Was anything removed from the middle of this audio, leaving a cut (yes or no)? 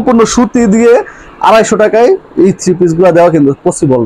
no